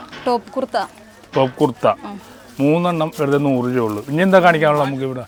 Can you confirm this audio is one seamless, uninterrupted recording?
yes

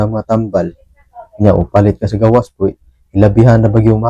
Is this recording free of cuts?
yes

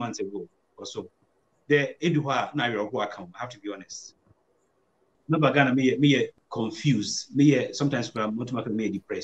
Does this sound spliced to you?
yes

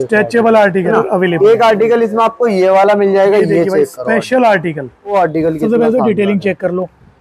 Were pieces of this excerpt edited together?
yes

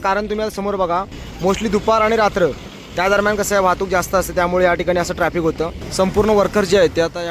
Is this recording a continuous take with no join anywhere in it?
no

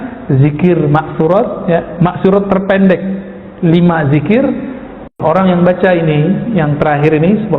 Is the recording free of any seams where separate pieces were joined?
no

